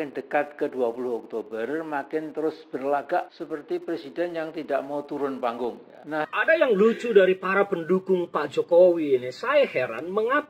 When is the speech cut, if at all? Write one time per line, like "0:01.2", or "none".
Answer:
0:06.3